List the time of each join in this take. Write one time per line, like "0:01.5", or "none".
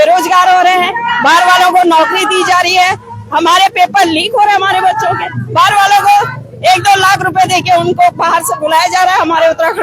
none

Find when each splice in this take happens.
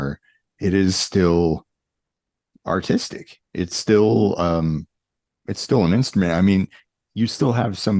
none

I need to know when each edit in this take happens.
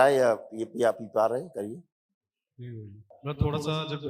0:03.1

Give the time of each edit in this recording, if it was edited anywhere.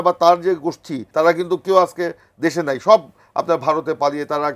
0:01.0

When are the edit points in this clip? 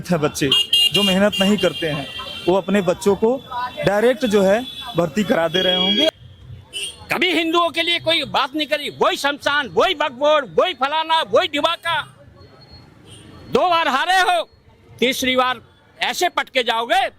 0:06.1

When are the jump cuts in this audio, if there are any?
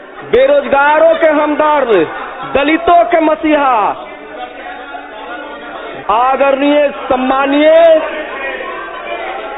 0:05.9

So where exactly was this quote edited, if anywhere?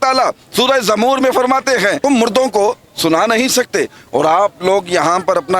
0:02.0

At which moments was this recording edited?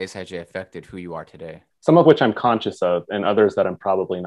0:01.7

